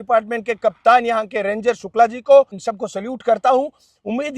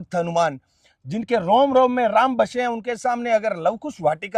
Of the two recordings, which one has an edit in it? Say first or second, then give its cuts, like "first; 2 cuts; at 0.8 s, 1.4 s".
first; 1 cut; at 2.6 s